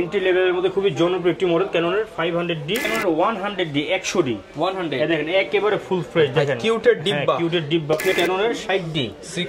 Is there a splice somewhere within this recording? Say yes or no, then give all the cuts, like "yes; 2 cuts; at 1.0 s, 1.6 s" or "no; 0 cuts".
yes; 2 cuts; at 2.9 s, 8.1 s